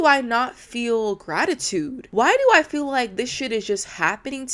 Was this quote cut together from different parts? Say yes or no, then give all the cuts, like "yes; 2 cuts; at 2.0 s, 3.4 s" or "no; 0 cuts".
yes; 1 cut; at 2.0 s